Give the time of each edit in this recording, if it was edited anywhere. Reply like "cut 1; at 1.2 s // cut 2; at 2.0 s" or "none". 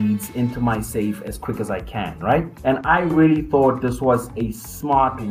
cut 1; at 2.5 s